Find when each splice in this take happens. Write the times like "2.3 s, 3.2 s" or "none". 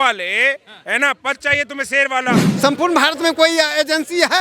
2.5 s